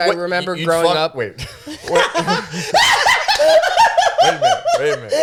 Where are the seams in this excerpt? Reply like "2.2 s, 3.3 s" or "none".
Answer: none